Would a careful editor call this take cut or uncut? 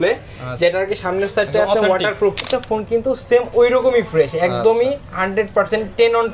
cut